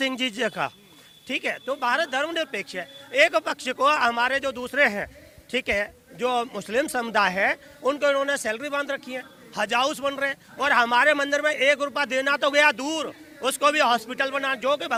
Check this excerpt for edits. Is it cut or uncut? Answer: uncut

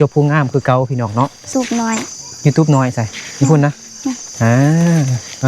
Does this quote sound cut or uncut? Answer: cut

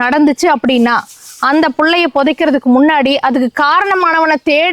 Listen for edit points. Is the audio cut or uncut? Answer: uncut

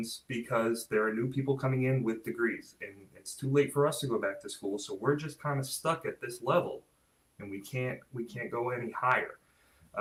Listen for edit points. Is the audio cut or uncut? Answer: uncut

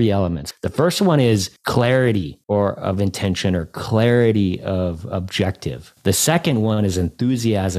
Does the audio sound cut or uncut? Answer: cut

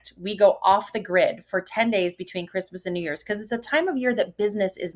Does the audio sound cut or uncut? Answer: uncut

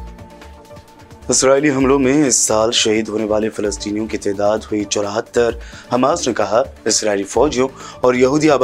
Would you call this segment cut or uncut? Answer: uncut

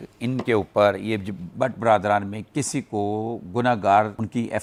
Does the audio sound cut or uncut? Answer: uncut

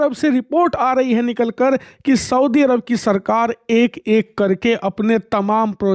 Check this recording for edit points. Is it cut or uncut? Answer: uncut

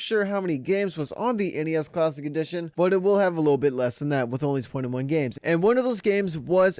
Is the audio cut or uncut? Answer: cut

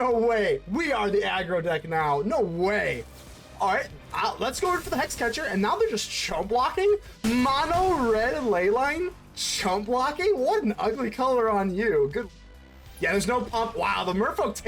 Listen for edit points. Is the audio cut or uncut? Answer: cut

